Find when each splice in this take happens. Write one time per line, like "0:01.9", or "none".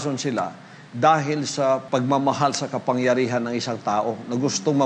0:01.8